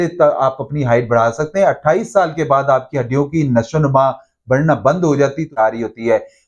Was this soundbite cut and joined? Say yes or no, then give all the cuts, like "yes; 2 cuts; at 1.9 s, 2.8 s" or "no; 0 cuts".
yes; 1 cut; at 5.6 s